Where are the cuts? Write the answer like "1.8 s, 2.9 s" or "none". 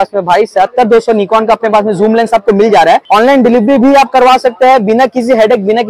3.0 s